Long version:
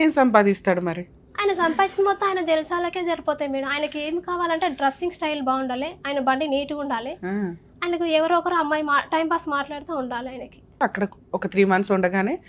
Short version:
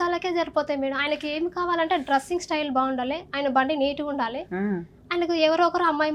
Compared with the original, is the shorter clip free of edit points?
yes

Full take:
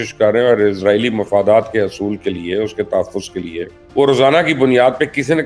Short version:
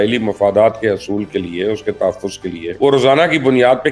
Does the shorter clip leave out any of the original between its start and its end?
yes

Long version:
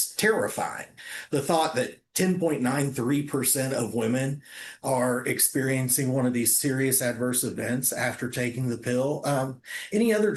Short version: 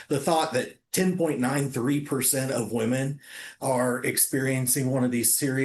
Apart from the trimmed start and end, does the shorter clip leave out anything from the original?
no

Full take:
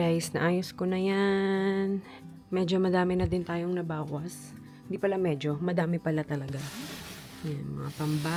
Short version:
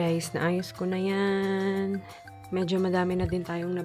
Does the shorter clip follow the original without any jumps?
yes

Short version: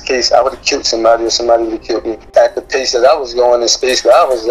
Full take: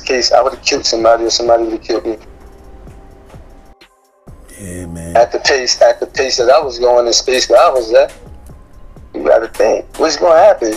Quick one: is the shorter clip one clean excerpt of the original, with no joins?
no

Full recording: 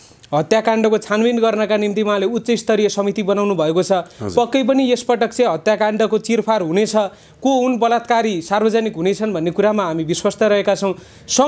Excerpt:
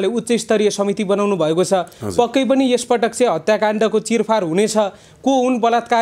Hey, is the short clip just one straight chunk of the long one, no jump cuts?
yes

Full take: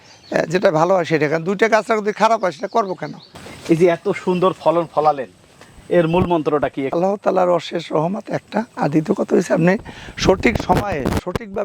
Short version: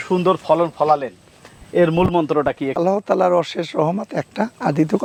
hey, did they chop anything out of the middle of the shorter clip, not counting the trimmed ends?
no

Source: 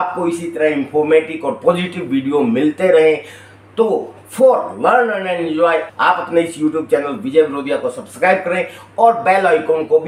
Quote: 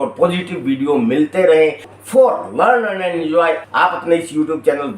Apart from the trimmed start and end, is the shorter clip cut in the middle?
yes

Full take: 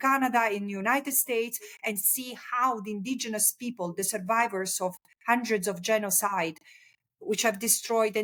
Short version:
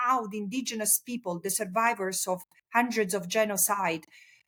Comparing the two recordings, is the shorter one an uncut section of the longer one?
yes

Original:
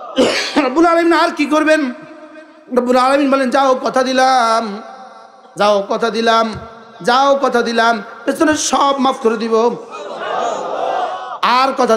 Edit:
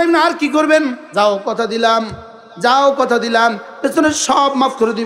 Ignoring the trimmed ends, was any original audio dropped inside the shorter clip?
yes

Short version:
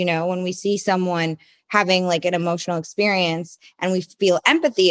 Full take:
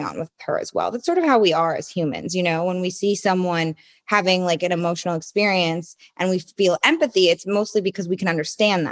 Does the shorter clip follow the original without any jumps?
yes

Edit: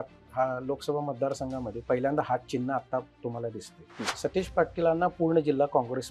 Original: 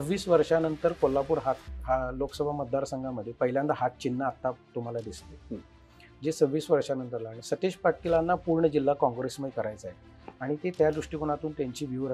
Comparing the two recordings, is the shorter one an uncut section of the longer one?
no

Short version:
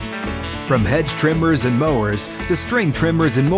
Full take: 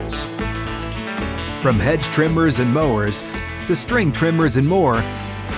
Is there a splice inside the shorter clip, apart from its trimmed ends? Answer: yes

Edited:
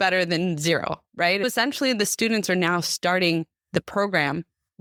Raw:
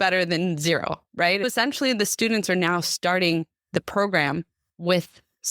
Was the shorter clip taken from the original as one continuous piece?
yes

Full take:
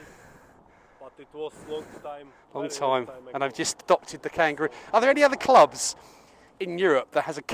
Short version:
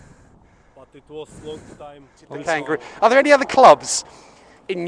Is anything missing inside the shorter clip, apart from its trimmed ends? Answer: yes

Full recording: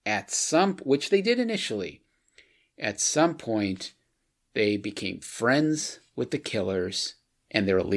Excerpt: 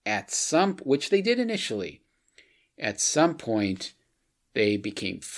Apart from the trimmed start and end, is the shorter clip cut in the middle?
no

